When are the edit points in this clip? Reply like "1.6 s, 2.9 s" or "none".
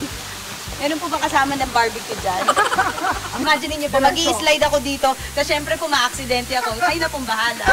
3.3 s